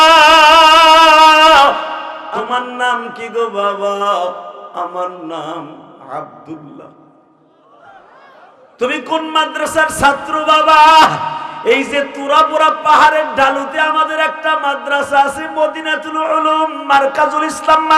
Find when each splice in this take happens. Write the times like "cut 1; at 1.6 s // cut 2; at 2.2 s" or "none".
cut 1; at 2.2 s